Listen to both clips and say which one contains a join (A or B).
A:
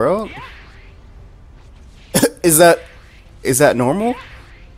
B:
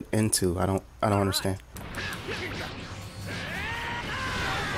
B